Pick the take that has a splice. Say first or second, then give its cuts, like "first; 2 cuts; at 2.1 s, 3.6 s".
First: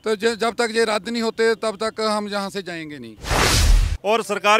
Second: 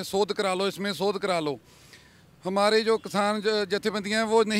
first; 1 cut; at 3.6 s